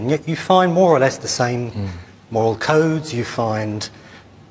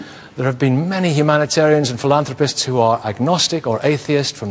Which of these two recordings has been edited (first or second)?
first